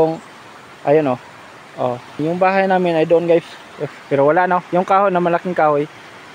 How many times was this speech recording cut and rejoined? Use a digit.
1